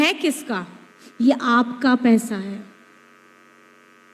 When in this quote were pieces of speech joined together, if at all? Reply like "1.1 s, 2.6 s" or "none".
none

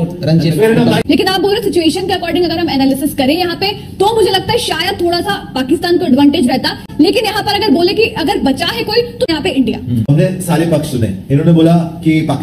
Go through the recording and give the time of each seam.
1.0 s, 6.8 s, 9.4 s

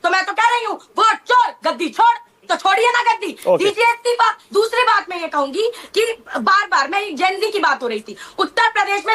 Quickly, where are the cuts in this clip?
4.4 s

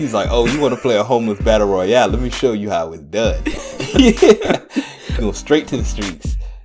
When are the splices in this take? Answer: none

